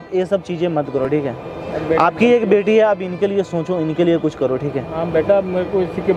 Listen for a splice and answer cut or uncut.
uncut